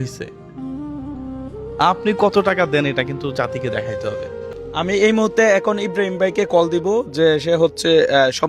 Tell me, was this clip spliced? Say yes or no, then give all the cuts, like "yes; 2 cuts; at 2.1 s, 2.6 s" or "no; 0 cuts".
yes; 1 cut; at 4.5 s